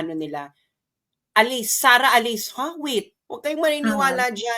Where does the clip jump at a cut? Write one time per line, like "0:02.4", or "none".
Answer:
0:03.2

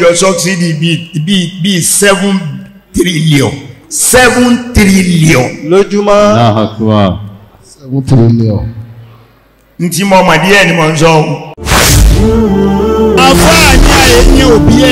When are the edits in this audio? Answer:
0:11.6

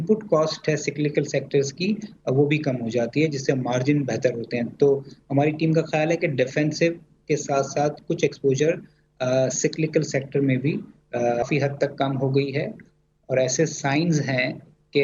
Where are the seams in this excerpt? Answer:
0:11.4

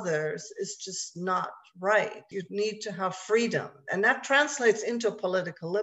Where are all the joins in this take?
0:02.2

